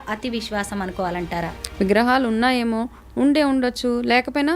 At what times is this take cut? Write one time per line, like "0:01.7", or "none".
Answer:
0:01.6